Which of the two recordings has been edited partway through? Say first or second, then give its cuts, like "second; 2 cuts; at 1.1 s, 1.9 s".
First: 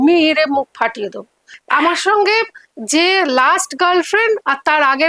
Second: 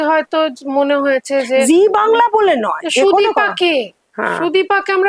first; 1 cut; at 1.4 s